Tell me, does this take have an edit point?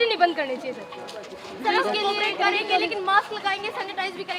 no; 0 cuts

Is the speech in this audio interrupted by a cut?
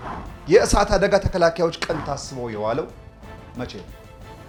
no; 0 cuts

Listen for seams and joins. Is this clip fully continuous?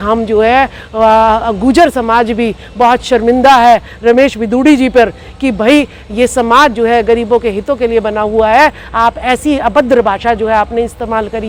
yes; 0 cuts

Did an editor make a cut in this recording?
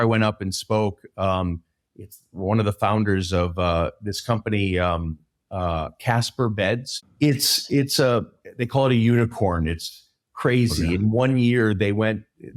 no; 0 cuts

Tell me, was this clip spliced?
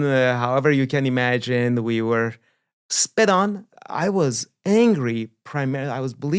yes; 1 cut; at 3.7 s

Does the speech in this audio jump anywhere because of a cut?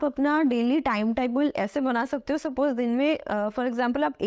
no; 0 cuts

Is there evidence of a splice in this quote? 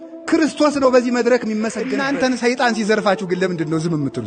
yes; 1 cut; at 2.0 s

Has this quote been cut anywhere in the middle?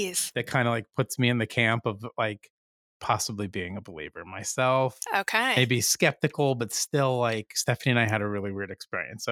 no; 0 cuts

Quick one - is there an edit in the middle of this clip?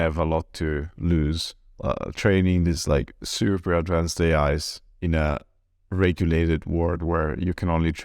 yes; 1 cut; at 1.7 s

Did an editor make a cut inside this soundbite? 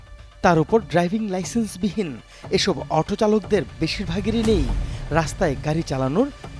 no; 0 cuts

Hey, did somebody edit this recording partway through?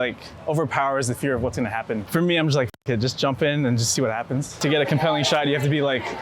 yes; 2 cuts; at 2.0 s, 4.6 s

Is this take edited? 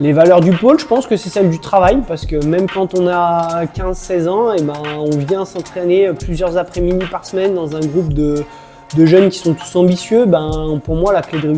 no; 0 cuts

